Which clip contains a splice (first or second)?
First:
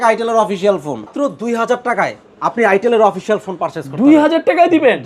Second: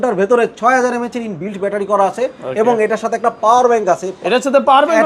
first